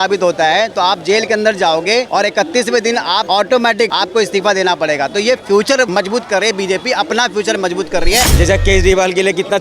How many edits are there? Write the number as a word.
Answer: five